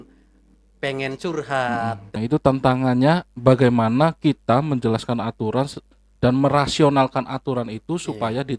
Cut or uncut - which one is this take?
cut